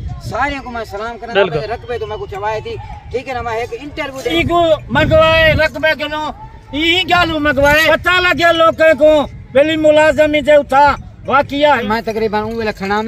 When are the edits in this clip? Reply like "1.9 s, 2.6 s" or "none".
1.3 s, 4.3 s, 7.8 s, 11.8 s

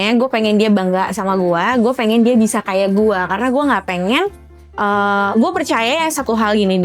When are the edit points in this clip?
none

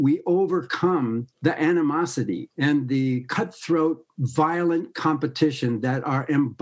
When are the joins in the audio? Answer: 1.3 s, 2.5 s

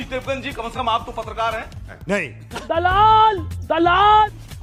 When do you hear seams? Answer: none

